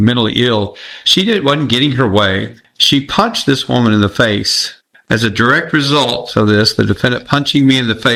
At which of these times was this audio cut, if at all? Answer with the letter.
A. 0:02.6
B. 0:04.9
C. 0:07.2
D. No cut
D